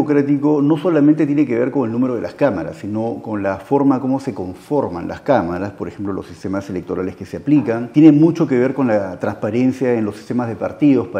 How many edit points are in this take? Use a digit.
1